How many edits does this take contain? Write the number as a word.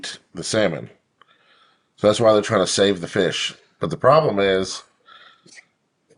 zero